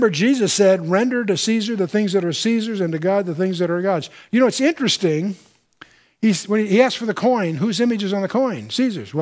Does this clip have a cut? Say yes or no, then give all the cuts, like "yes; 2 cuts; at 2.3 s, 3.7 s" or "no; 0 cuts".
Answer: yes; 1 cut; at 7.5 s